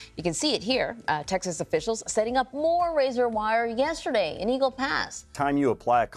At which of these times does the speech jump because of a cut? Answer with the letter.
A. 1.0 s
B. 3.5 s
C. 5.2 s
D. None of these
C